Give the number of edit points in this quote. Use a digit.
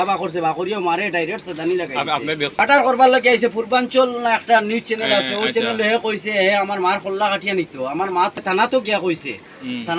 2